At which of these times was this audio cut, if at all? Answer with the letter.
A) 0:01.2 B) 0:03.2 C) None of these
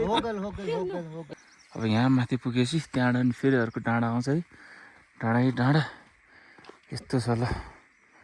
A